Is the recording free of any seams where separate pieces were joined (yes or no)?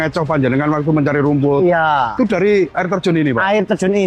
yes